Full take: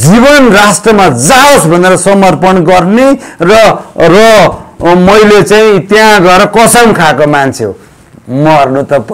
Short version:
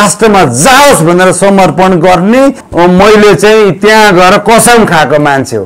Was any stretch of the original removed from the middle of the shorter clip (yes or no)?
yes